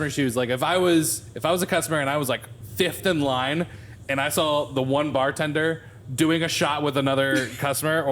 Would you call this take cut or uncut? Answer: cut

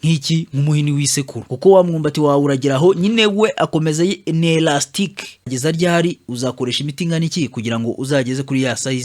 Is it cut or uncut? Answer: cut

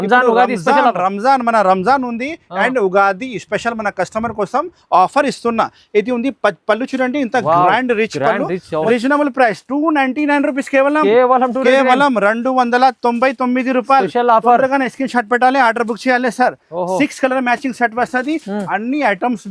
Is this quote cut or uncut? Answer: cut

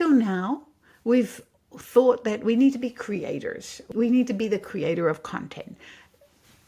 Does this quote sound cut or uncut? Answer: cut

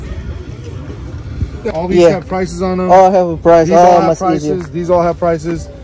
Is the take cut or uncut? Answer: cut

